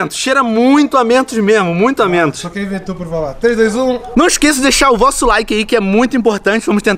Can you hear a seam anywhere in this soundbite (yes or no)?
yes